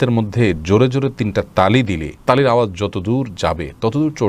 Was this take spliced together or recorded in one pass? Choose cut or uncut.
uncut